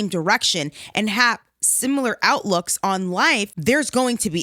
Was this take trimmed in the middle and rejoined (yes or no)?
yes